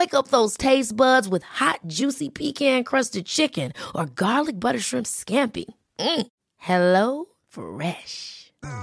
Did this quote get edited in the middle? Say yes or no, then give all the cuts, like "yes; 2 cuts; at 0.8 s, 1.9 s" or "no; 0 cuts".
no; 0 cuts